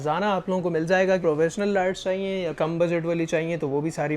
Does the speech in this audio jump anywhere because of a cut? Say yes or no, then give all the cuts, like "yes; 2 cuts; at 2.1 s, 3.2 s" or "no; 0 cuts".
no; 0 cuts